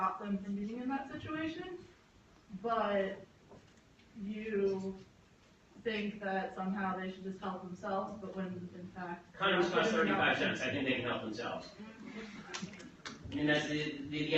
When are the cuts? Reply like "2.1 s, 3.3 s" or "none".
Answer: 6.1 s